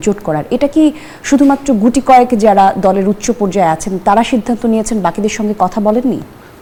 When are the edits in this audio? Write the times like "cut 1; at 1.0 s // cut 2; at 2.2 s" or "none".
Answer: none